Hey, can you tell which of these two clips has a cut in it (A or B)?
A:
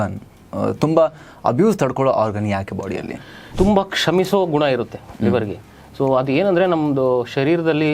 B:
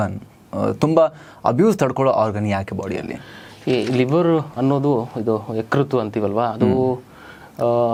A